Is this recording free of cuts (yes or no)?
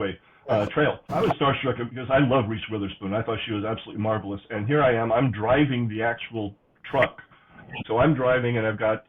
no